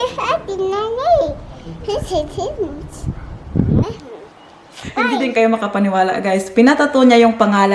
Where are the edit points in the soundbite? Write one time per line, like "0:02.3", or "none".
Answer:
0:05.1